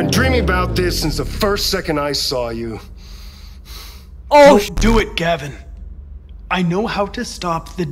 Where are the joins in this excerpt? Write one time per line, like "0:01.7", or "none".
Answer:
none